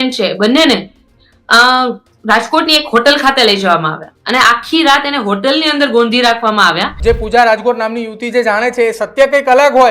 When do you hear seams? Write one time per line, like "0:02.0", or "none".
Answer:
0:06.9